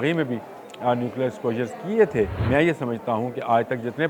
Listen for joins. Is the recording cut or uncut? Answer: cut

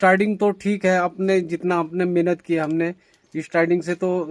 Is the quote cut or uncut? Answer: uncut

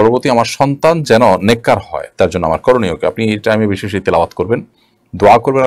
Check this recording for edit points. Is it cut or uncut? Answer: uncut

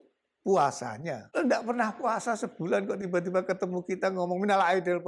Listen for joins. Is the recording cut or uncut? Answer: cut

